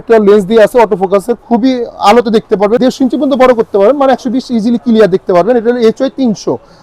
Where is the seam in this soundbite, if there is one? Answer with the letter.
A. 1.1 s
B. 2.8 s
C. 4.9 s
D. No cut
B